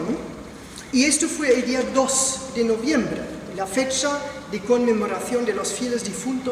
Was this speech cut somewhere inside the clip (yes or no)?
yes